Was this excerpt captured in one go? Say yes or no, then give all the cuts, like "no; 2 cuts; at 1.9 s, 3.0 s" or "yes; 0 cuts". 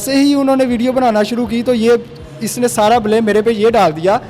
yes; 0 cuts